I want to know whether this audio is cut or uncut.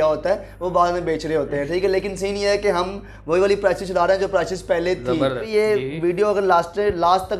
cut